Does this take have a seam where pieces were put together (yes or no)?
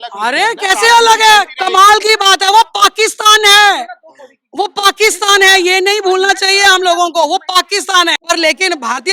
yes